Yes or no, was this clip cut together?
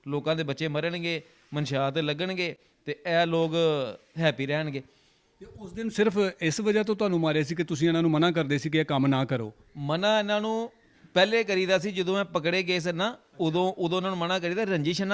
no